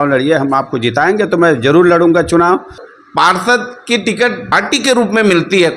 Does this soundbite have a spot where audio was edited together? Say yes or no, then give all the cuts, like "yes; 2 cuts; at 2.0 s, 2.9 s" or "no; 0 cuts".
yes; 2 cuts; at 2.9 s, 4.5 s